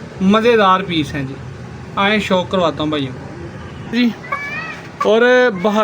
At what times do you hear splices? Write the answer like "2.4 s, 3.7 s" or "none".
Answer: 3.9 s